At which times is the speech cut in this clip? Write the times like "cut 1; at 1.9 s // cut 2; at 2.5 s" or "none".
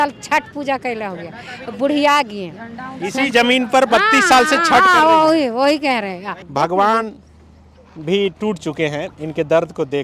cut 1; at 6.3 s